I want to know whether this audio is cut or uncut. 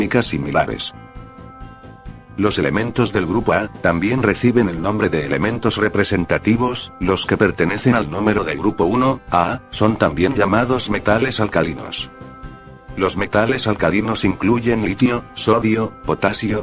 uncut